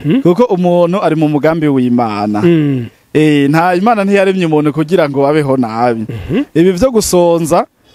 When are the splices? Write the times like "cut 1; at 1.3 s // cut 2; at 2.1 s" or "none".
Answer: none